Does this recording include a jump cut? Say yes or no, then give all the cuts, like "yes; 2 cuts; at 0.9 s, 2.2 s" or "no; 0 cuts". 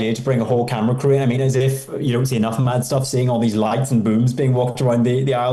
no; 0 cuts